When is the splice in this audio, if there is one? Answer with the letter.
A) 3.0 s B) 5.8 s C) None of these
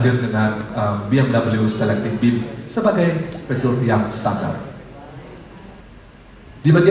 B